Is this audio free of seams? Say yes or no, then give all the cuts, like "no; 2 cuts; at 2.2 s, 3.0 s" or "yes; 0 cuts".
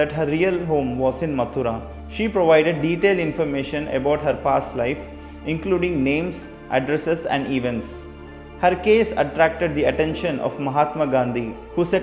no; 1 cut; at 1.9 s